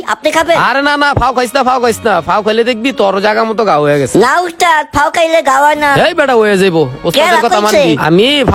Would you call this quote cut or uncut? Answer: uncut